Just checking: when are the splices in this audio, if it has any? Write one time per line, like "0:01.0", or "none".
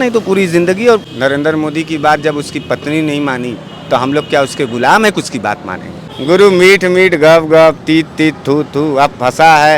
0:01.1
0:06.0